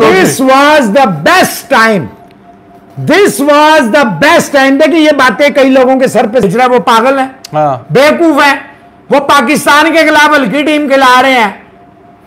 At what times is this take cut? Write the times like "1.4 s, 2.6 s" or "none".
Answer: 6.4 s